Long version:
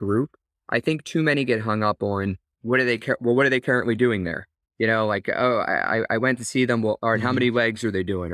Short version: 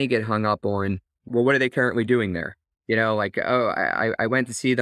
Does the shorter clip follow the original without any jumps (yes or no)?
no